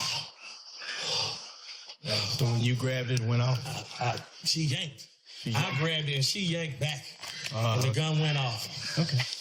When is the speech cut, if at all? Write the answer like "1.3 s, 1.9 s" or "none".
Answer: none